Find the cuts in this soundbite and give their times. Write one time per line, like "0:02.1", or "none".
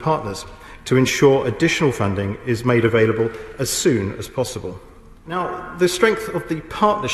0:05.4